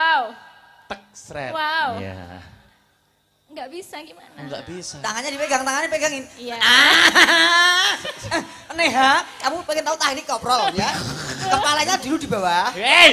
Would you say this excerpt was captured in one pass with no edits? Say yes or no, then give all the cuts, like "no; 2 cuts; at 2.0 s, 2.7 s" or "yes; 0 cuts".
yes; 0 cuts